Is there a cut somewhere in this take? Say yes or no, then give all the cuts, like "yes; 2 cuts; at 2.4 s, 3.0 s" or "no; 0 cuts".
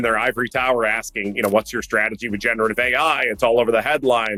no; 0 cuts